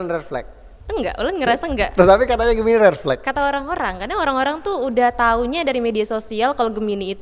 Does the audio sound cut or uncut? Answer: uncut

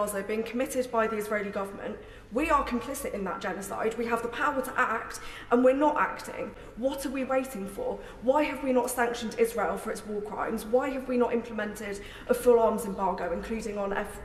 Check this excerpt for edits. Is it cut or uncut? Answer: uncut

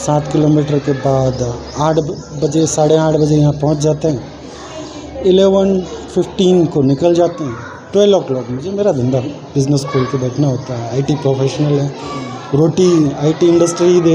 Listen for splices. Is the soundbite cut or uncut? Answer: uncut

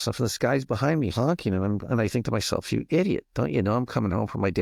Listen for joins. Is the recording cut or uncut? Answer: uncut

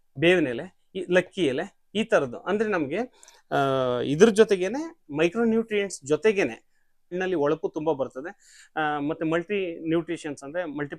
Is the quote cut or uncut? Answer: cut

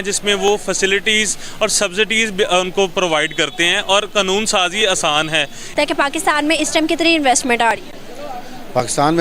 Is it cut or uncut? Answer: cut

